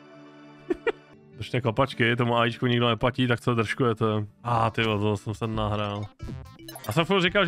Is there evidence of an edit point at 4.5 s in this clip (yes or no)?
yes